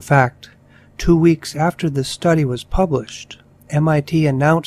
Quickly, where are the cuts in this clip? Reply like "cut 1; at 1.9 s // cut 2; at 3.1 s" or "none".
cut 1; at 1.2 s

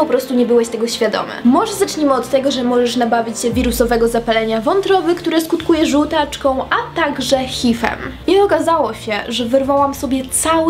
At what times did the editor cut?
cut 1; at 1.3 s // cut 2; at 8.0 s

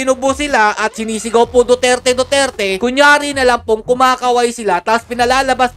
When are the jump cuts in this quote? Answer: none

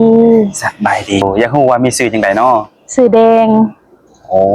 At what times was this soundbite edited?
cut 1; at 1.2 s

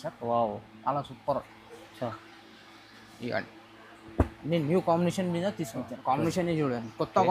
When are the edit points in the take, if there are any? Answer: cut 1; at 5.8 s

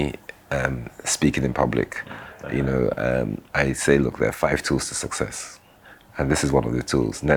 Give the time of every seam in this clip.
none

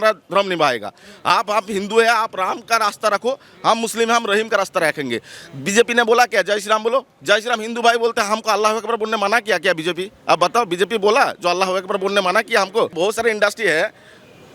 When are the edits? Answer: cut 1; at 12.9 s

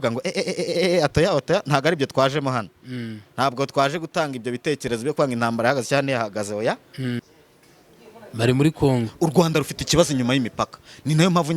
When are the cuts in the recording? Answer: cut 1; at 7.3 s

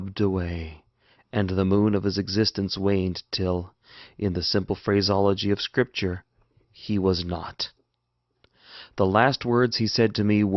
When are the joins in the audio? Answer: cut 1; at 3.2 s

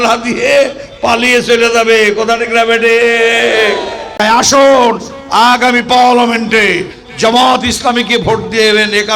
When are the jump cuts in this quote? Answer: cut 1; at 4.0 s

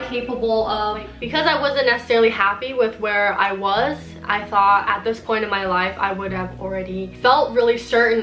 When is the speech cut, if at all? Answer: cut 1; at 1.2 s // cut 2; at 7.1 s

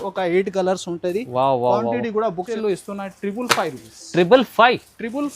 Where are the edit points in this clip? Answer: cut 1; at 2.5 s

